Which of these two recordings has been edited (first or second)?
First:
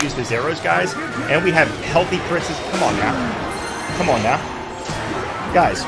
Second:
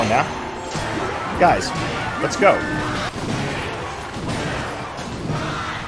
second